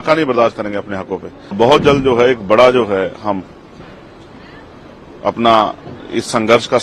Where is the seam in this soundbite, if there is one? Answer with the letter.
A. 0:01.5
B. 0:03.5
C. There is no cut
A